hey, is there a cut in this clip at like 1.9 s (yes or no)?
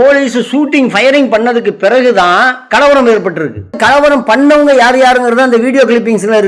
no